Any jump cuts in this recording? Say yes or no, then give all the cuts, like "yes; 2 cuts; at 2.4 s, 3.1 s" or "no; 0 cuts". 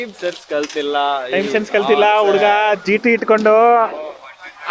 no; 0 cuts